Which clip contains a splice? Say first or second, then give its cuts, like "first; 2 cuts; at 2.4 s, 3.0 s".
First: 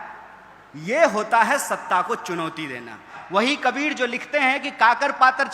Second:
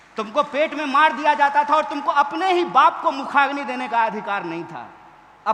first; 1 cut; at 3.1 s